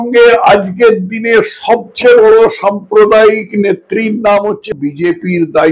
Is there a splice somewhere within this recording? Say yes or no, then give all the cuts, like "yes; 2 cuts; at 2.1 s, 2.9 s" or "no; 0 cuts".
yes; 1 cut; at 4.7 s